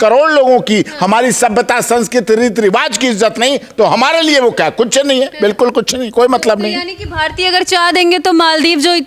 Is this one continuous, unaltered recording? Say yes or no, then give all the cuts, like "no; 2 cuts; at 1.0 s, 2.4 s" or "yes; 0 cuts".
yes; 0 cuts